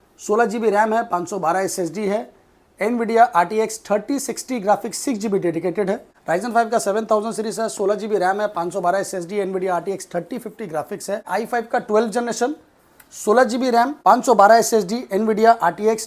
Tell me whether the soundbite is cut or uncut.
cut